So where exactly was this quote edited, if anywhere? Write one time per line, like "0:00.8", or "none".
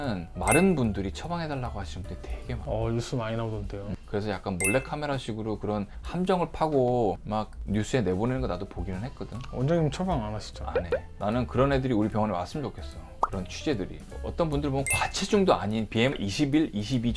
none